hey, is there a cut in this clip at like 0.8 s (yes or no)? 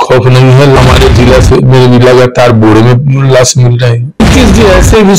yes